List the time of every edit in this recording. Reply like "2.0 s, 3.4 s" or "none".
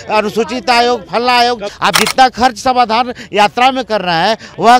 1.7 s